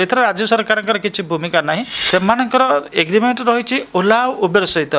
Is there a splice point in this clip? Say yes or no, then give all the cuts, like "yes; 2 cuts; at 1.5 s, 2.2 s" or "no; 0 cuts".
yes; 1 cut; at 1.9 s